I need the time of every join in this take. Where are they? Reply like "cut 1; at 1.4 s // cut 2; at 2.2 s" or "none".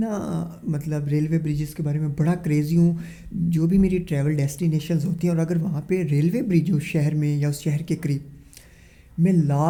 none